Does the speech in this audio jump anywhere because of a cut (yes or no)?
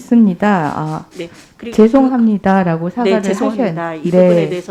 no